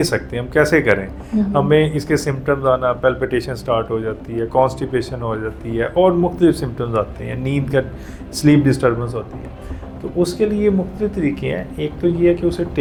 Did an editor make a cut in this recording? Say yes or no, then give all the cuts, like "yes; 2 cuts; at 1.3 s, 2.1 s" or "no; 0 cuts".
no; 0 cuts